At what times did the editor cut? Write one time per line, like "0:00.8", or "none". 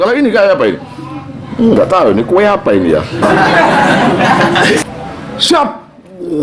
0:04.9